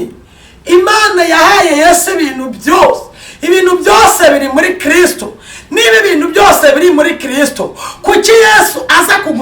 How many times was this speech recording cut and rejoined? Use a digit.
0